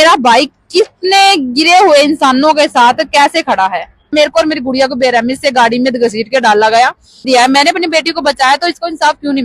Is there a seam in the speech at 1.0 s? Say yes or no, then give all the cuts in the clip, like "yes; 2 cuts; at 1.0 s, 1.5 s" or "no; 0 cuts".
no; 2 cuts; at 4.1 s, 7.2 s